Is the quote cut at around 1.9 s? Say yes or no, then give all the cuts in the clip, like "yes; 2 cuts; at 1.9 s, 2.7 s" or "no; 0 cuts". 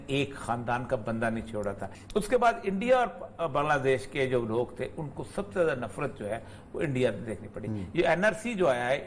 yes; 1 cut; at 1.9 s